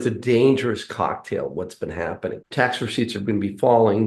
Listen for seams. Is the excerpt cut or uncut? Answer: cut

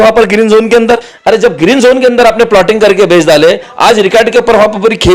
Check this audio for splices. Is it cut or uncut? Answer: cut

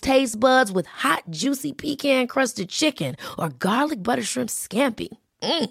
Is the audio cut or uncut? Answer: uncut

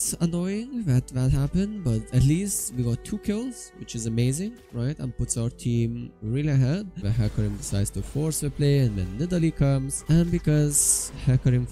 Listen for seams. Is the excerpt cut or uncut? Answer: cut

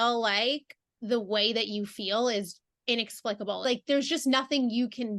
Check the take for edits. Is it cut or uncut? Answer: cut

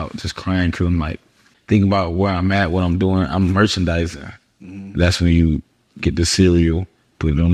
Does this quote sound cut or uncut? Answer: uncut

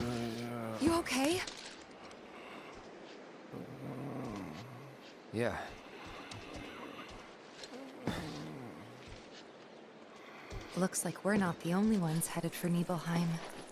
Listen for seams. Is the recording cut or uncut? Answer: uncut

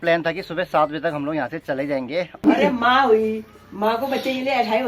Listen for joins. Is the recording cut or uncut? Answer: cut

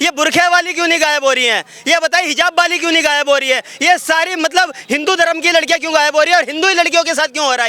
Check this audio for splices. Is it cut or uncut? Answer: uncut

